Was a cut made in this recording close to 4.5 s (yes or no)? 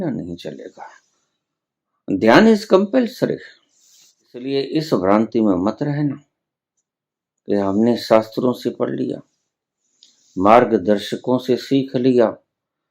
yes